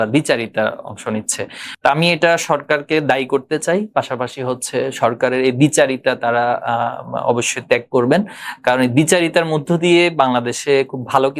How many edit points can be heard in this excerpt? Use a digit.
1